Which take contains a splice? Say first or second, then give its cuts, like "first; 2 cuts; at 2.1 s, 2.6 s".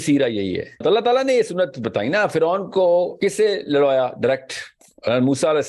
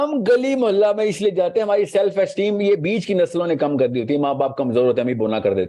first; 2 cuts; at 0.8 s, 3.1 s